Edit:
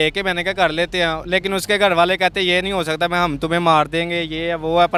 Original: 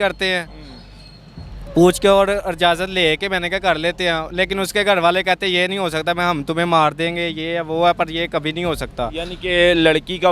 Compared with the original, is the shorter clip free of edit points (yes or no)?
yes